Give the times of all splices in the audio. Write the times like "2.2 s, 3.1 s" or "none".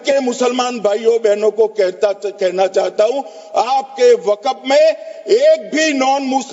none